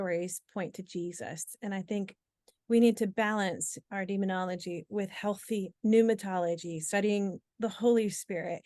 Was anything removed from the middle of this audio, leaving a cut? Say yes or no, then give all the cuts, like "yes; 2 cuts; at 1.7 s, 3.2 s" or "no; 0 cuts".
no; 0 cuts